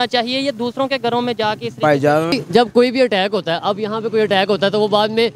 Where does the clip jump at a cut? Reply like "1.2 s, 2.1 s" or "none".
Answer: 2.4 s